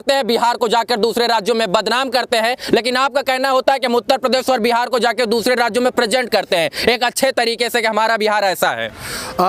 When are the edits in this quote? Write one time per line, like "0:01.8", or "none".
none